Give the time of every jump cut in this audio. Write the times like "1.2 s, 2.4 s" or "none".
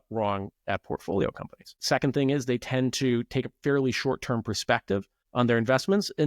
5.2 s